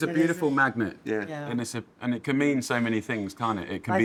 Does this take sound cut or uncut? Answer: uncut